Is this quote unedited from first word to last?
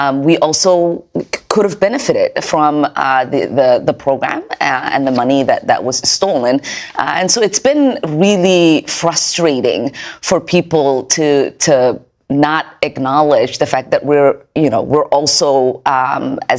yes; 0 cuts

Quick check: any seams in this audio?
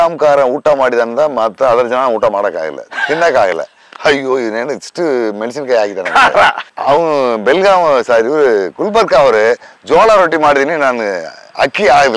no; 0 cuts

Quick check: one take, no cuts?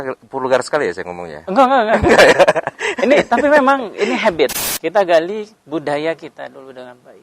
no; 1 cut; at 4.6 s

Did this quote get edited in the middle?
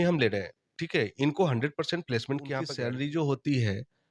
yes; 1 cut; at 2.7 s

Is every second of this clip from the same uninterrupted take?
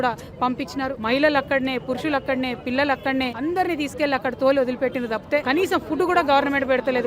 no; 3 cuts; at 1.0 s, 3.3 s, 5.4 s

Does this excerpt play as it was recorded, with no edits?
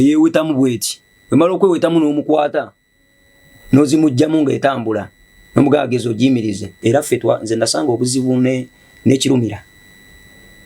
no; 1 cut; at 6.7 s

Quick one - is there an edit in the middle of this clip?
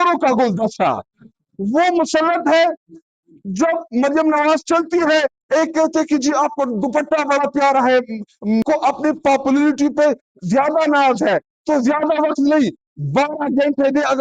yes; 1 cut; at 8.6 s

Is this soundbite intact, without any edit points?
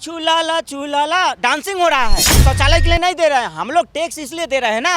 no; 1 cut; at 2.3 s

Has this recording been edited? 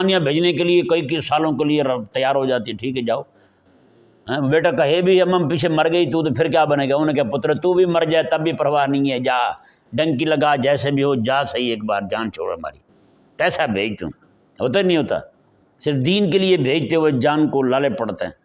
no; 0 cuts

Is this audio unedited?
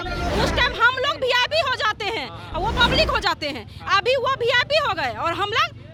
yes; 0 cuts

